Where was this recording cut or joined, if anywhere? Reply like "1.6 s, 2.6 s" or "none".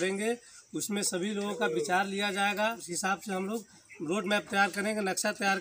2.9 s